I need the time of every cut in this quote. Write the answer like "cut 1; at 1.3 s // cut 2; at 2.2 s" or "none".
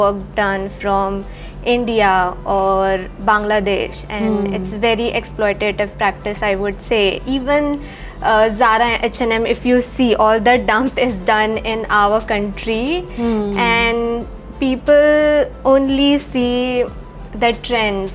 none